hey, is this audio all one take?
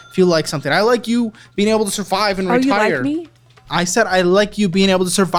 yes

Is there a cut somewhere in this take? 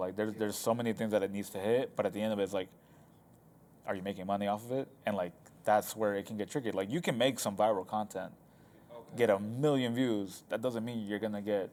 no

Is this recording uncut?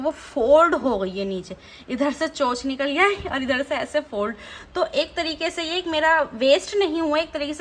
yes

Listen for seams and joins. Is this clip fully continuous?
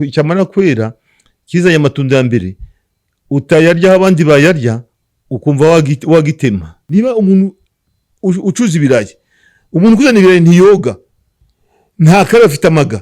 no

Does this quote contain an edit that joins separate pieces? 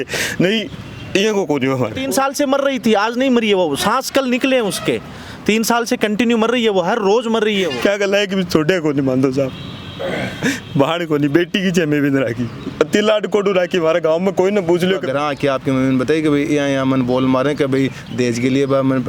yes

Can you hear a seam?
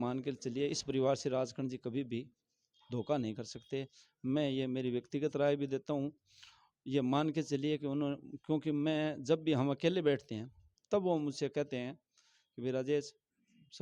no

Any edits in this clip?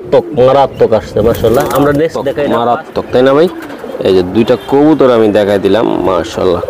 yes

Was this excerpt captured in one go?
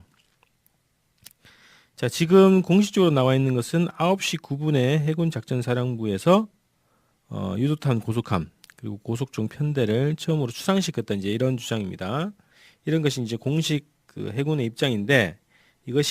no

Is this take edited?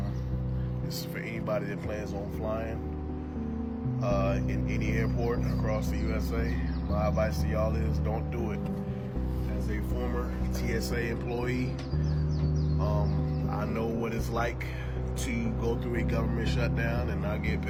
no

